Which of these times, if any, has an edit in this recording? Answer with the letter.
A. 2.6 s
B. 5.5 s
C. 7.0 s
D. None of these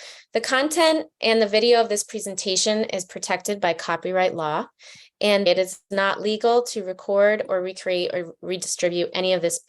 B